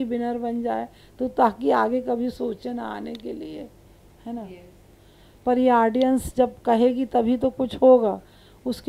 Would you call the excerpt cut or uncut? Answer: uncut